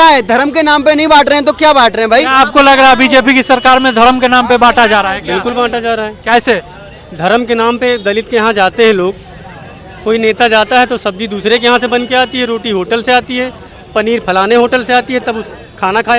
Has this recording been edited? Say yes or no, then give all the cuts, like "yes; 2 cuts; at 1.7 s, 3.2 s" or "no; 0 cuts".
no; 0 cuts